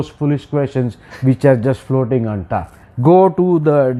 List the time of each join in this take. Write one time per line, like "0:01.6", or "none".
none